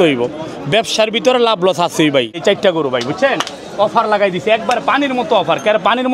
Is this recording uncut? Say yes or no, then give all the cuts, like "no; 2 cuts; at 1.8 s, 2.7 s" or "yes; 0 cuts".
no; 1 cut; at 2.4 s